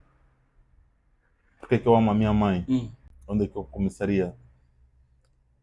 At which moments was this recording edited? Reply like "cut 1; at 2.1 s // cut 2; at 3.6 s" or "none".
none